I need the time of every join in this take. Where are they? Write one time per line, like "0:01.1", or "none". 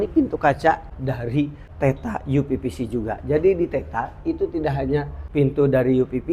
0:01.2
0:05.2